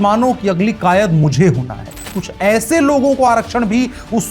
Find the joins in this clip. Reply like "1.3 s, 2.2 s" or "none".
2.1 s